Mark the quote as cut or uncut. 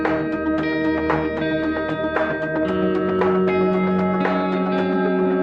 cut